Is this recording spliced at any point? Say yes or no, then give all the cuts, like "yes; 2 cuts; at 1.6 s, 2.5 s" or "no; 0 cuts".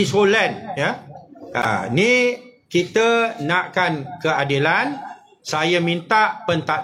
no; 0 cuts